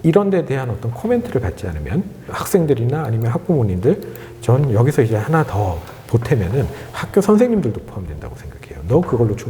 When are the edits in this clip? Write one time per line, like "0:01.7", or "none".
0:02.3